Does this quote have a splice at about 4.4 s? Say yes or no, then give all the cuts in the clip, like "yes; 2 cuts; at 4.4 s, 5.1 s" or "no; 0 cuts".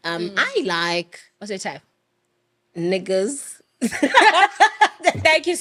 no; 0 cuts